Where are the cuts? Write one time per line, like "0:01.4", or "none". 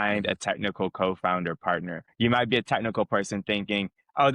0:02.0

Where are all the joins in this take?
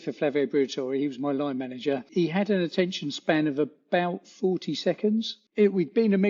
0:02.1
0:05.4

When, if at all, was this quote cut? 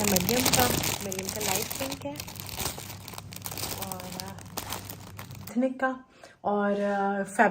0:05.5

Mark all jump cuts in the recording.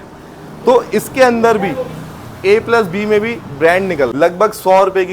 0:04.1

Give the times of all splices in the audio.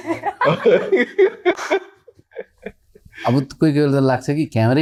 none

